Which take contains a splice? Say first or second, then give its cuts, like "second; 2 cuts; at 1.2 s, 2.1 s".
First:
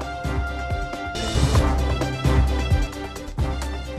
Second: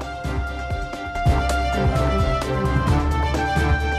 second; 1 cut; at 1.1 s